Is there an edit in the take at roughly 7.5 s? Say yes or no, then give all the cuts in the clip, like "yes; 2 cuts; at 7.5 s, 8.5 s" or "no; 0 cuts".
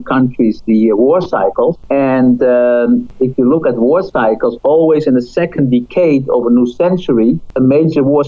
yes; 3 cuts; at 1.8 s, 3.1 s, 7.5 s